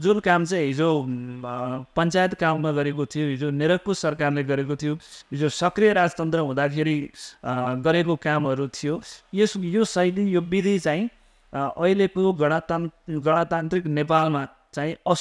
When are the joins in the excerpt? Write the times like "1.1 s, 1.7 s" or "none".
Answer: none

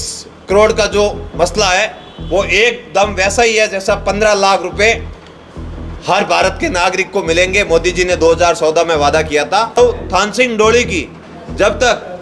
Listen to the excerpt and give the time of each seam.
9.8 s

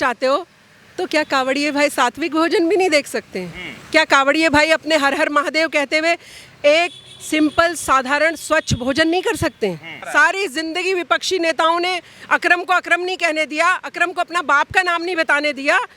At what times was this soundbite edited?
9.9 s

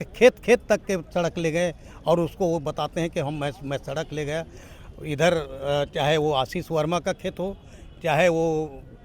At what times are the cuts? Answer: none

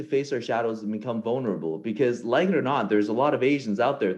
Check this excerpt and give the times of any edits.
none

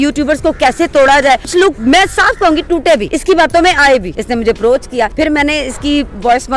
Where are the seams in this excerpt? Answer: 1.6 s, 3.1 s, 4.1 s, 5.1 s

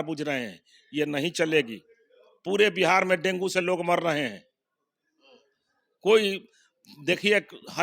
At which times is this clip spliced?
none

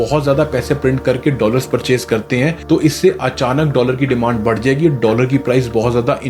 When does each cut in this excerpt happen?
none

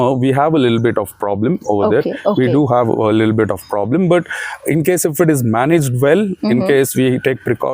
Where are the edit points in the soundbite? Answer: none

